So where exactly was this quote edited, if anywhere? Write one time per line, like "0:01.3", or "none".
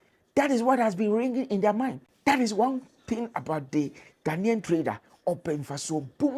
0:02.1

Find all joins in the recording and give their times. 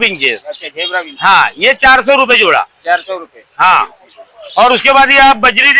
none

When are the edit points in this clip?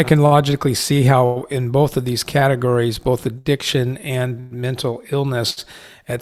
none

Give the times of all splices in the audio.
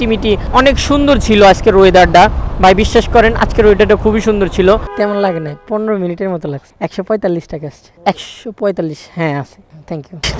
0:04.9

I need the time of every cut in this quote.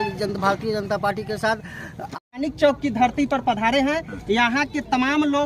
0:02.1

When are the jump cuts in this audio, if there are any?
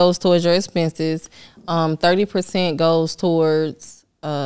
none

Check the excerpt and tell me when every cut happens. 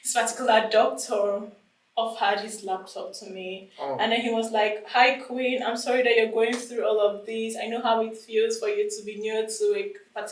none

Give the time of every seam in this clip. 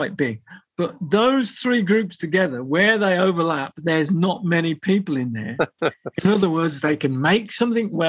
none

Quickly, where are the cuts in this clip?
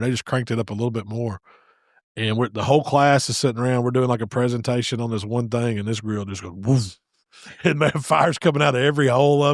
none

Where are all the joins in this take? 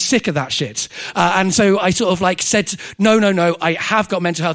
none

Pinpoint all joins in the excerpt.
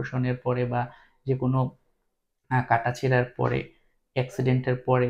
none

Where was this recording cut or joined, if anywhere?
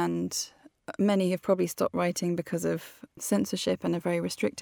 0:03.2

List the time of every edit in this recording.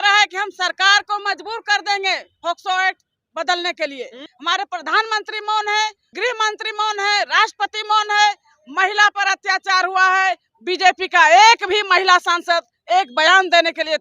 0:04.3
0:06.1

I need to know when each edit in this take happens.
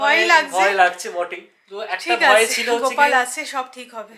none

